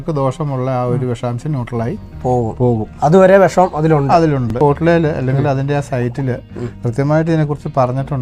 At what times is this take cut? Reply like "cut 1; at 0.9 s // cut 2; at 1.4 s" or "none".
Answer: cut 1; at 4.5 s

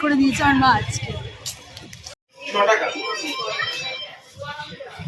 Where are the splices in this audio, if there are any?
none

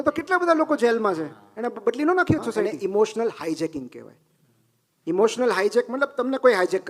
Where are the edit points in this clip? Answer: cut 1; at 2.7 s

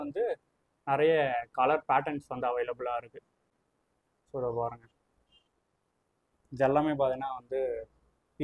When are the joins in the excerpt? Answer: none

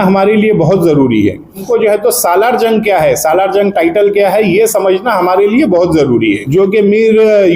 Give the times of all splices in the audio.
cut 1; at 1.6 s // cut 2; at 6.4 s

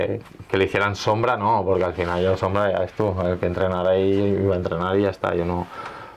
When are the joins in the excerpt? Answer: none

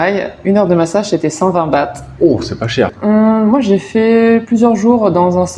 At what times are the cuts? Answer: cut 1; at 2.9 s

